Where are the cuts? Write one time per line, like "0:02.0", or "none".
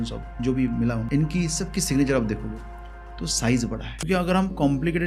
0:01.0
0:04.0

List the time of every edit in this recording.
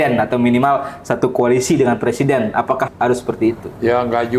0:02.9

